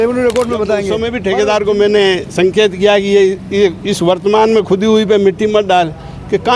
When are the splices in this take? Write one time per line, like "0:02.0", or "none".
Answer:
0:01.2